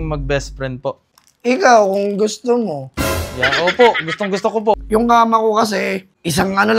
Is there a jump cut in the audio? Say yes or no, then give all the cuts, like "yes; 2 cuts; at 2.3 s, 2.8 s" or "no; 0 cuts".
yes; 2 cuts; at 1.1 s, 4.8 s